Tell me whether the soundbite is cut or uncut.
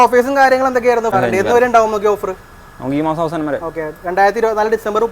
cut